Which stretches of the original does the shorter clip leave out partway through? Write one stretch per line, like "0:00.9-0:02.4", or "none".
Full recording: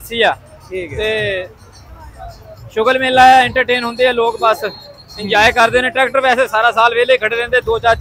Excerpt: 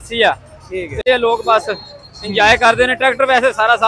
0:01.0-0:03.9